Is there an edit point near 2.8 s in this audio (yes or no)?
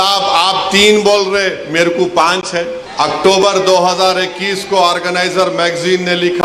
yes